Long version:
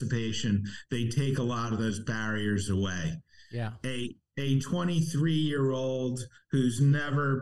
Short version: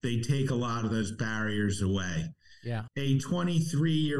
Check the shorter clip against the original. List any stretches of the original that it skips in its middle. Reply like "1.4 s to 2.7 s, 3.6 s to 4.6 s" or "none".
3.7 s to 4.2 s